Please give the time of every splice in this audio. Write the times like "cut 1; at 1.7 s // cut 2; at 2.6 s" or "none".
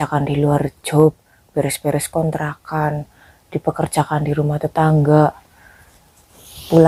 none